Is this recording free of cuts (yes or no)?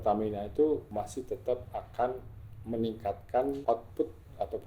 no